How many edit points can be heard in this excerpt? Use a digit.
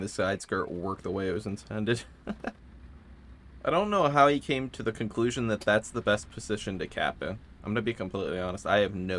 0